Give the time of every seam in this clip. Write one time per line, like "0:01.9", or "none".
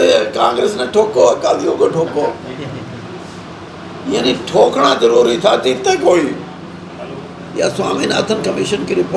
0:07.9